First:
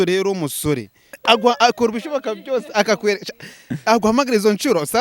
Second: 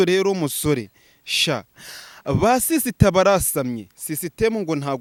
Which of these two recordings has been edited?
first; 1 cut; at 1.2 s

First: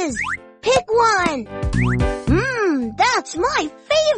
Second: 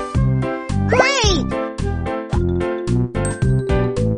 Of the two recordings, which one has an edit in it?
first; 1 cut; at 1.5 s

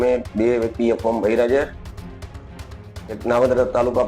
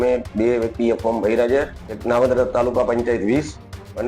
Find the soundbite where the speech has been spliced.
second; 1 cut; at 1.9 s

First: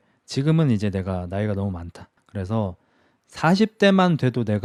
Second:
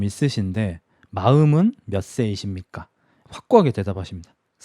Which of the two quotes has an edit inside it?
second; 1 cut; at 3.2 s

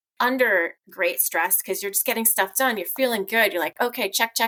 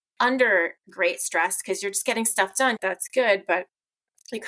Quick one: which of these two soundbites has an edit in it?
second; 1 cut; at 2.8 s

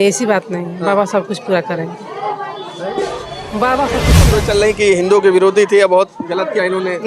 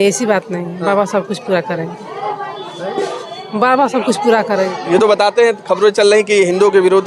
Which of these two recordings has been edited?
first; 1 cut; at 4.2 s

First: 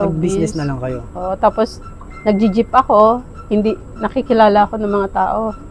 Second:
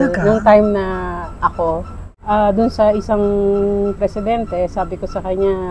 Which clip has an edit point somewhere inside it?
second; 1 cut; at 2.0 s

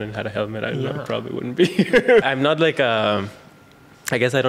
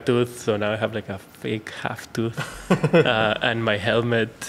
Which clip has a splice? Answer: first; 1 cut; at 2.2 s

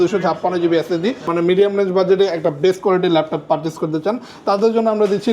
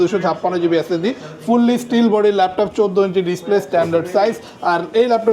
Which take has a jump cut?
first; 1 cut; at 1.3 s

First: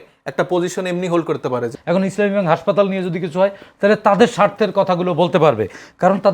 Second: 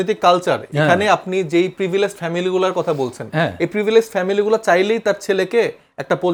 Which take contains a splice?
first; 1 cut; at 1.7 s

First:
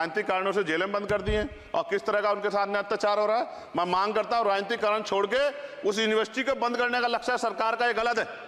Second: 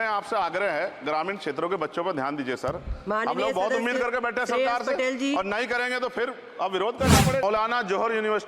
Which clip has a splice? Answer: second; 1 cut; at 7.4 s

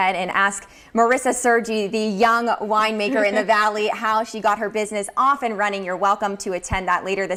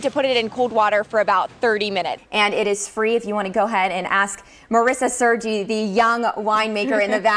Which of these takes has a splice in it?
second; 1 cut; at 2.2 s

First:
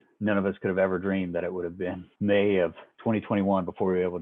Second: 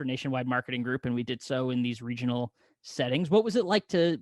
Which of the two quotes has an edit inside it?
first; 2 cuts; at 2.1 s, 2.9 s

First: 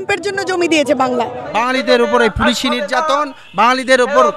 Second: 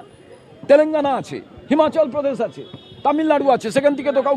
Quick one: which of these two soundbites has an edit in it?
first; 1 cut; at 1.4 s

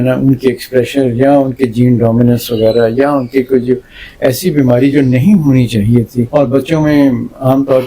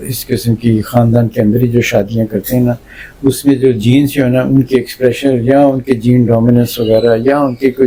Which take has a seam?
first; 1 cut; at 6.3 s

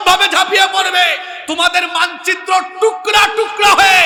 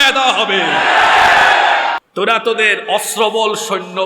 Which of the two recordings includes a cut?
second; 1 cut; at 2.0 s

